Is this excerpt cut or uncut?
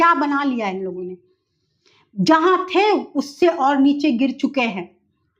uncut